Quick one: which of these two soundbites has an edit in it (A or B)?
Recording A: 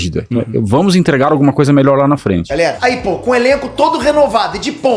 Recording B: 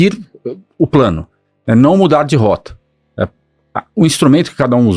A